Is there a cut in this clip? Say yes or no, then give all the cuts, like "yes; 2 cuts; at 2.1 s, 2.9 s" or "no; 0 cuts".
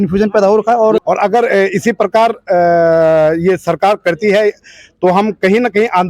yes; 1 cut; at 1.0 s